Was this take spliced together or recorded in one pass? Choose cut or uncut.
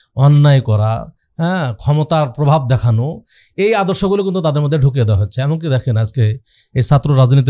uncut